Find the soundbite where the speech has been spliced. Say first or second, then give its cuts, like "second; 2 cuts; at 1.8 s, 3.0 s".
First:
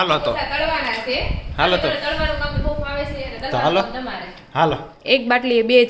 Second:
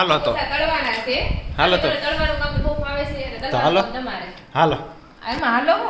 first; 1 cut; at 4.9 s